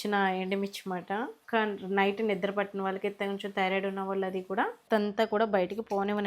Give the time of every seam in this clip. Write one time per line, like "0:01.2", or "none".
0:01.4
0:04.8